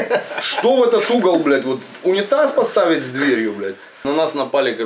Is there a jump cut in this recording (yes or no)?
yes